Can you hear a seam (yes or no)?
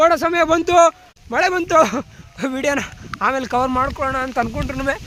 no